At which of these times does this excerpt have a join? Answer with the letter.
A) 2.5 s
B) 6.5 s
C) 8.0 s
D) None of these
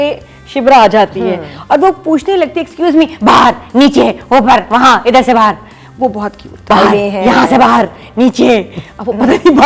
B